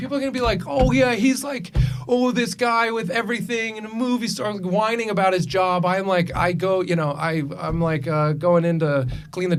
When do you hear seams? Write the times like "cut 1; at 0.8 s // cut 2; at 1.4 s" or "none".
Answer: none